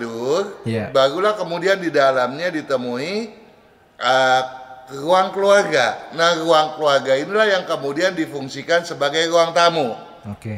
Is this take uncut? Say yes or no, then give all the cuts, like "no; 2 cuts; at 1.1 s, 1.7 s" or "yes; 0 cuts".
yes; 0 cuts